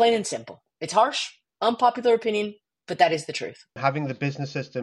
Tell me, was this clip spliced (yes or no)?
yes